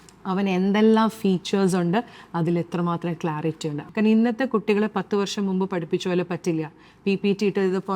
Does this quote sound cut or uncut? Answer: cut